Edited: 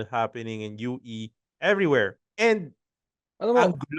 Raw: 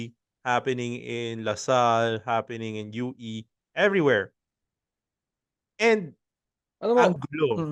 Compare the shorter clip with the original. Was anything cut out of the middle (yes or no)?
yes